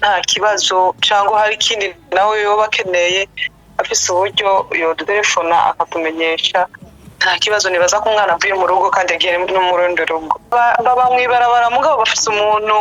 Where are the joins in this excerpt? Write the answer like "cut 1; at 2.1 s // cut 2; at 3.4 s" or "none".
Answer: cut 1; at 10.4 s